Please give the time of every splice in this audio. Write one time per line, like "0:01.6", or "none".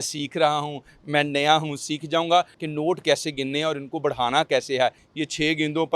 0:02.6
0:05.0